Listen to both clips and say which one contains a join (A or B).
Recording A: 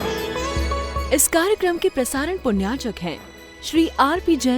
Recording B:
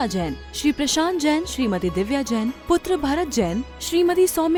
A